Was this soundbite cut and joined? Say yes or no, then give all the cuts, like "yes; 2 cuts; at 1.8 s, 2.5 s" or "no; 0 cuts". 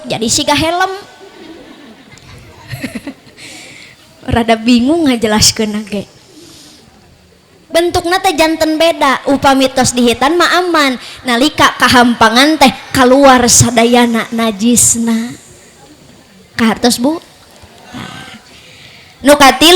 no; 0 cuts